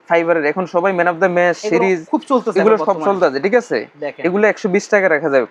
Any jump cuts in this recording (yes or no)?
no